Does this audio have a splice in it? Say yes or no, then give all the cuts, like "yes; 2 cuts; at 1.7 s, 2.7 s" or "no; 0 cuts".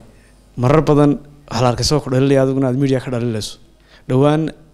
no; 0 cuts